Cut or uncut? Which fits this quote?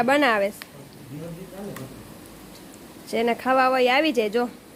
uncut